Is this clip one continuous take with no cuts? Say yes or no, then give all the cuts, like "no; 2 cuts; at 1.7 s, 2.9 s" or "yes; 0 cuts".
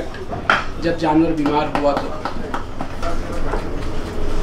yes; 0 cuts